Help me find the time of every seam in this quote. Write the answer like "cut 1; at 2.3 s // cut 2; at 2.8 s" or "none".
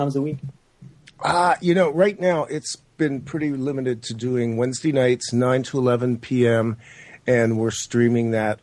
cut 1; at 1.4 s